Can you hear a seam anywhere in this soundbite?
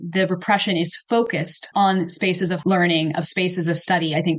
yes; 2 cuts; at 1.6 s, 2.6 s

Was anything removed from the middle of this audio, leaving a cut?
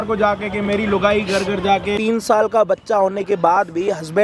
yes; 1 cut; at 2.0 s

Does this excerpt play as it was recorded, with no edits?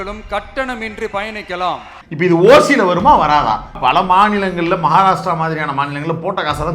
no; 1 cut; at 3.8 s

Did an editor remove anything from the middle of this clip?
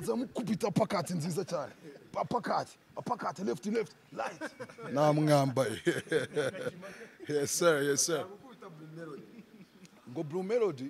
no; 0 cuts

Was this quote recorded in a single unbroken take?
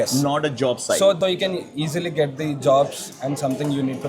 no; 1 cut; at 1.2 s

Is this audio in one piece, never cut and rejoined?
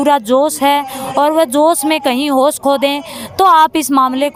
yes; 0 cuts

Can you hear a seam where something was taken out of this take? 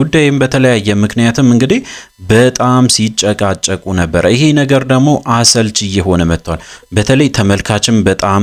no; 0 cuts

